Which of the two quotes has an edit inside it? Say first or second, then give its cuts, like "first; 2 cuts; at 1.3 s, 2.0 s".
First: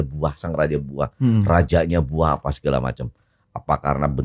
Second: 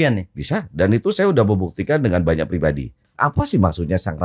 second; 1 cut; at 3.0 s